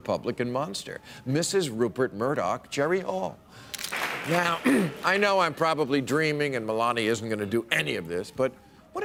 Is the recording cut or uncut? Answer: uncut